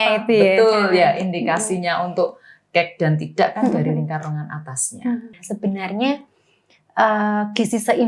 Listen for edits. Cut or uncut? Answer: cut